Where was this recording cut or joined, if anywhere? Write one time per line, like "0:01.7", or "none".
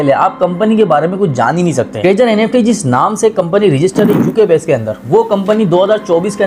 none